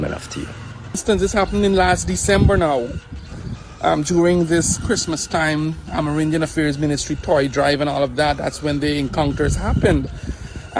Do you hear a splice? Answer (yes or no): yes